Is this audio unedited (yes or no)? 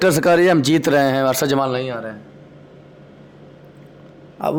yes